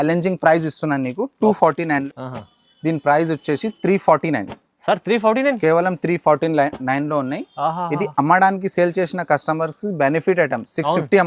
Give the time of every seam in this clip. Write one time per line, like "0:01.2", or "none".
0:02.0

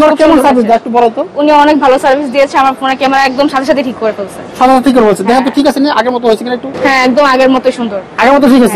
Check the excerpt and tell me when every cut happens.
none

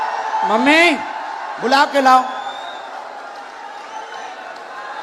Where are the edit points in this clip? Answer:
none

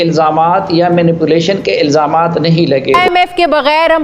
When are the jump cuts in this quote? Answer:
0:02.9

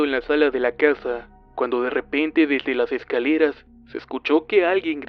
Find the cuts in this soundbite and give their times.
0:01.6

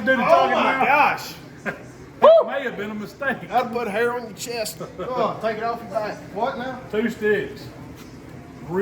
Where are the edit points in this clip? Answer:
0:06.3

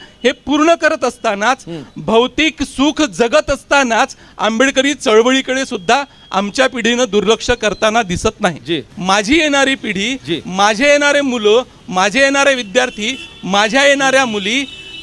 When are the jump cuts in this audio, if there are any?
0:08.9

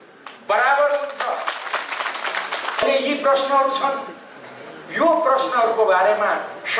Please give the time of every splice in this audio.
0:02.8

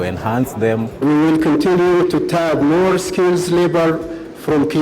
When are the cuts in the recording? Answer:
0:01.0

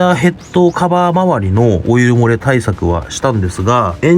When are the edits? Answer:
none

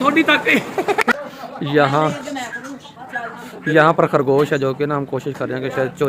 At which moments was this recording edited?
0:01.3

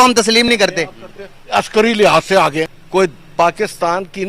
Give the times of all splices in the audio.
0:02.8

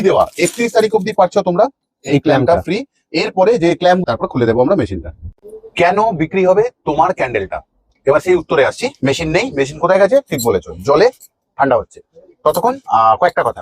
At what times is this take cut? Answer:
0:04.0

